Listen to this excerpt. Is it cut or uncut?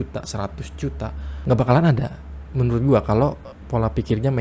cut